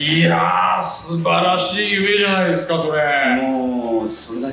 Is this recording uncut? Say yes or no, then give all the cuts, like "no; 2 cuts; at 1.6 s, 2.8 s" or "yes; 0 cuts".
yes; 0 cuts